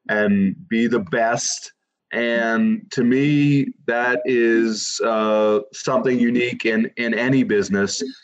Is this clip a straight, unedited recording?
no; 1 cut; at 2.0 s

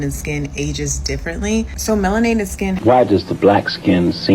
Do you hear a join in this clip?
yes; 1 cut; at 2.8 s

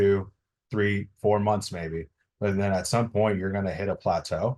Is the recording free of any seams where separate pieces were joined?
yes; 0 cuts

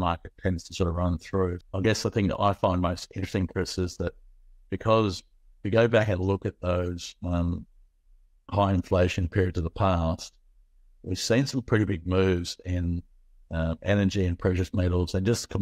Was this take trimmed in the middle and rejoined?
yes; 1 cut; at 1.6 s

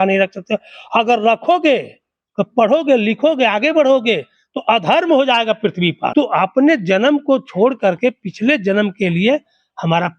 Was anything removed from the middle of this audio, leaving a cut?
yes; 1 cut; at 6.0 s

